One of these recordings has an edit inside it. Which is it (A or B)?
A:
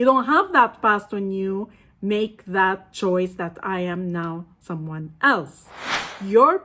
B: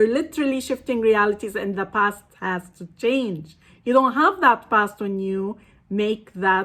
A